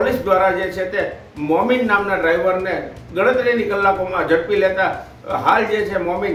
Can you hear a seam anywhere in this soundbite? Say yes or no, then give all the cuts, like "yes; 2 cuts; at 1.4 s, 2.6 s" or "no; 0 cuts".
no; 0 cuts